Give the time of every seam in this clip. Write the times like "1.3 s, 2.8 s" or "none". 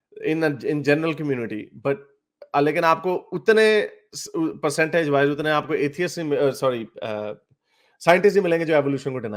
none